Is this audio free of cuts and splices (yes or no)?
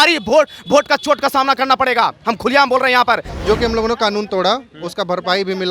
no